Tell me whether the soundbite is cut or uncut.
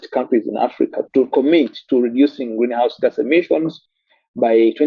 cut